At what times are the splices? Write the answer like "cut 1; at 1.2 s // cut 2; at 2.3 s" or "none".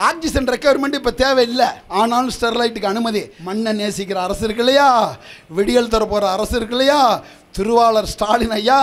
cut 1; at 1.8 s // cut 2; at 3.4 s